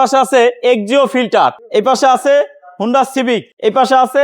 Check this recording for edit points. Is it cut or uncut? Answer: cut